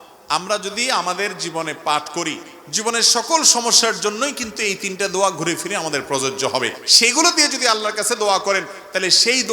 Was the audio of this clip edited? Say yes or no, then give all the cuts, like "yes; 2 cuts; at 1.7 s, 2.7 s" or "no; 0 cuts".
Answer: yes; 1 cut; at 6.8 s